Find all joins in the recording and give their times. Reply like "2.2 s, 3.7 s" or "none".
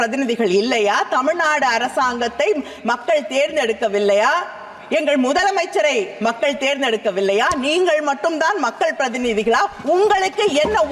none